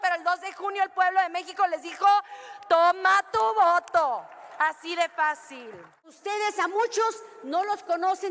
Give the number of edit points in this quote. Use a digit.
1